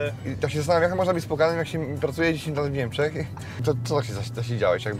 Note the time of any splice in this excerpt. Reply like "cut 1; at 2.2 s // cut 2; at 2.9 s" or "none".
cut 1; at 3.6 s

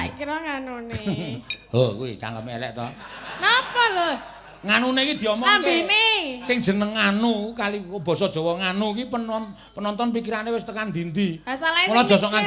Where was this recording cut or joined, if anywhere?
none

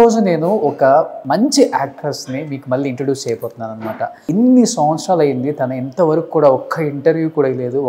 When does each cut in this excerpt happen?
cut 1; at 1.2 s // cut 2; at 4.2 s

